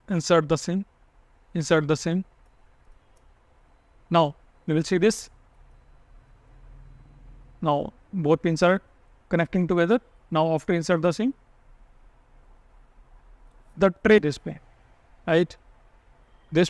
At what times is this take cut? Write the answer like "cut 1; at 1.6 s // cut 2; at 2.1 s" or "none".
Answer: cut 1; at 14.2 s